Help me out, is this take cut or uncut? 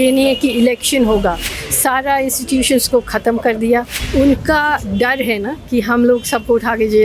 cut